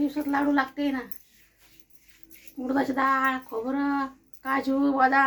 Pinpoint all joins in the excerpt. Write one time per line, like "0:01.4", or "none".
none